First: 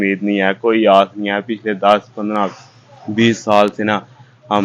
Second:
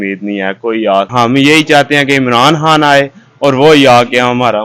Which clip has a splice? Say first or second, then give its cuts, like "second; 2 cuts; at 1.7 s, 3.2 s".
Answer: second; 1 cut; at 1.1 s